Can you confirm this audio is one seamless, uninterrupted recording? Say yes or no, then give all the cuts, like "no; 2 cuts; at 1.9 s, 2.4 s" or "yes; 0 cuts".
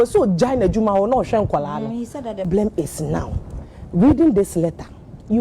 no; 1 cut; at 2.5 s